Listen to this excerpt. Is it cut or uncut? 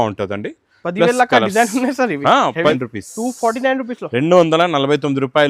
cut